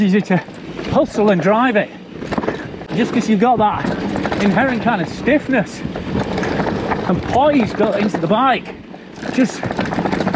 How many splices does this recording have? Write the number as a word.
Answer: one